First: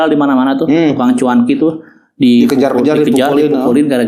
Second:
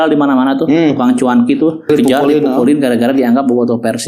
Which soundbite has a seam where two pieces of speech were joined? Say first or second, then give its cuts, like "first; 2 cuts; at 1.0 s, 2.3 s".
second; 1 cut; at 1.9 s